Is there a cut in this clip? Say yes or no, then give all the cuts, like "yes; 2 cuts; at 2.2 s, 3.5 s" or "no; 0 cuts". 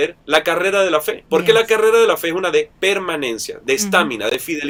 no; 0 cuts